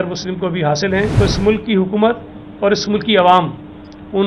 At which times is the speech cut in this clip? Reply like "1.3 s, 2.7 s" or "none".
1.1 s